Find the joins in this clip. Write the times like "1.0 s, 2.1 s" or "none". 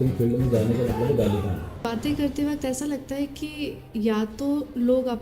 1.9 s